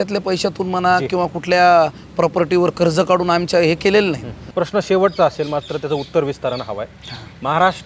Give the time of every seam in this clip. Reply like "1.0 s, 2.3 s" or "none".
4.4 s